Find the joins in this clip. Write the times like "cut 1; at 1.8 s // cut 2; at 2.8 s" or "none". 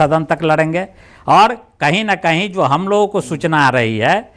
none